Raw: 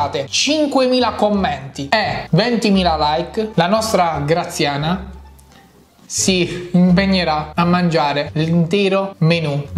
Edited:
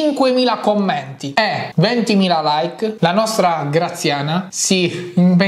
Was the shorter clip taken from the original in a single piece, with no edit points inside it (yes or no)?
no